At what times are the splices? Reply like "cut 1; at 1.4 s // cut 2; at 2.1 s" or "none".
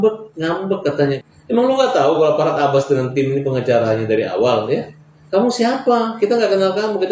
cut 1; at 1.2 s